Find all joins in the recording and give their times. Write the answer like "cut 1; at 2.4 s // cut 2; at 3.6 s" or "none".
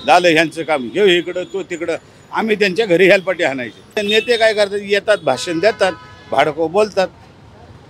cut 1; at 4.0 s